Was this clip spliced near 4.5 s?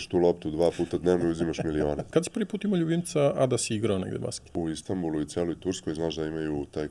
yes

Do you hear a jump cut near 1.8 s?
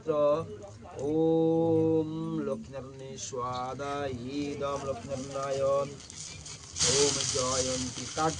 no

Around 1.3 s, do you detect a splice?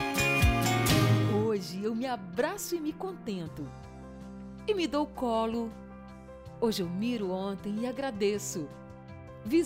yes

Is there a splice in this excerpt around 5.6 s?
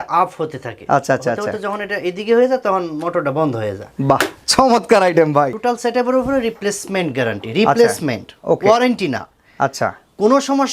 yes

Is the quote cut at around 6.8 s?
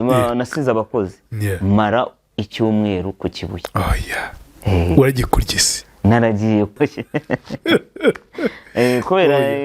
yes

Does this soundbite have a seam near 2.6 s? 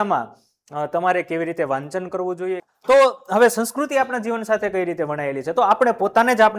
yes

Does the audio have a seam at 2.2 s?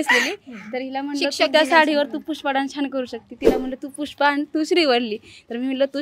no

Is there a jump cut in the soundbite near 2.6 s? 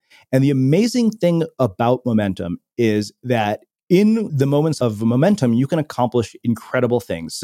no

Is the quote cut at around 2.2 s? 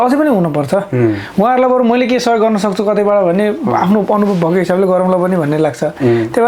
no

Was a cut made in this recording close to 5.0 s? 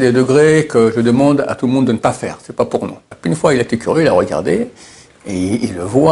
no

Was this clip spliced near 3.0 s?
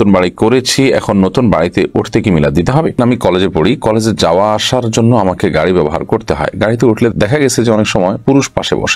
yes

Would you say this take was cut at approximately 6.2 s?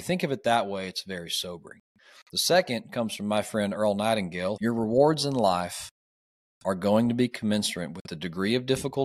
no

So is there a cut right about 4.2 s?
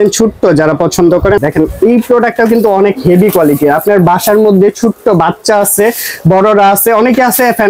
no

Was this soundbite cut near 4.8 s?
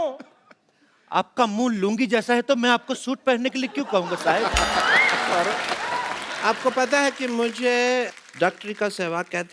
no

